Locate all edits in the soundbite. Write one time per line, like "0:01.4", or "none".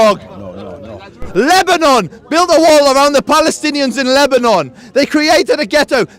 0:01.3